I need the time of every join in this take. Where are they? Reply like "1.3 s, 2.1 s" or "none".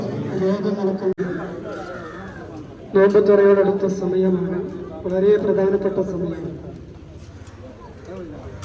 1.2 s

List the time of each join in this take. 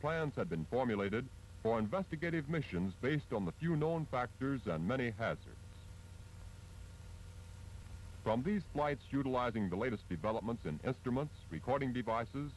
9.4 s

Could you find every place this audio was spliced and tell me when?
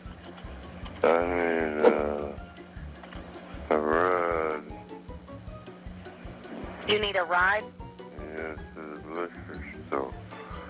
none

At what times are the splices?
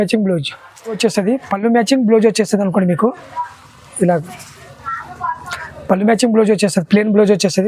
1.0 s

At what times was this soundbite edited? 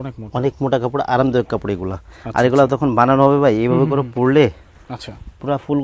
none

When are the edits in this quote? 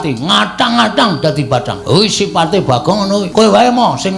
1.7 s, 3.3 s

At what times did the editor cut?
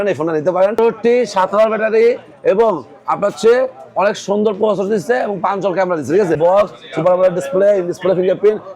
0.8 s, 6.4 s

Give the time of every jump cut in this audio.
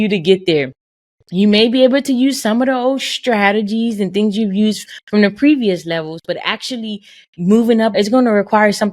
7.9 s

